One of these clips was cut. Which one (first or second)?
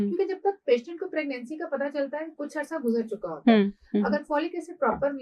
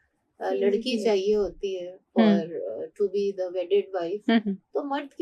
first